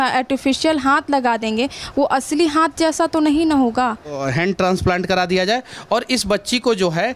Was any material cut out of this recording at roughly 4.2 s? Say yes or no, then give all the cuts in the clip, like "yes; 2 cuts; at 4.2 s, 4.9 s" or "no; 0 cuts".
yes; 1 cut; at 4.2 s